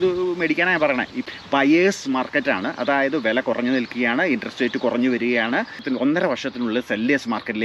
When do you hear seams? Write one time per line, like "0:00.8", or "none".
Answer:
0:01.2
0:05.8